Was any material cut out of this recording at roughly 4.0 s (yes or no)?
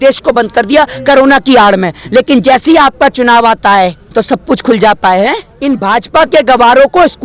yes